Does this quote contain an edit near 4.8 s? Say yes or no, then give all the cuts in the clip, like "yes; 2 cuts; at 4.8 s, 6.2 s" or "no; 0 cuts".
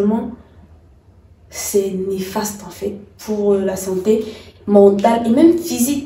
no; 0 cuts